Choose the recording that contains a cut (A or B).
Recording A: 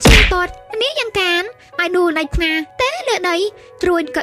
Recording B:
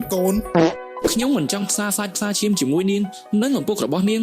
B